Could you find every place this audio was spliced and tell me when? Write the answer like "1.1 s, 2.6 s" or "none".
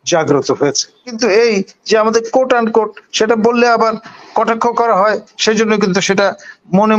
1.1 s